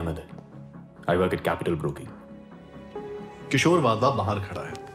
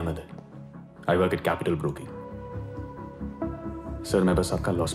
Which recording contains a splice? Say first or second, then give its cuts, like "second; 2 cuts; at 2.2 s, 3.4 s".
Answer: second; 1 cut; at 2.3 s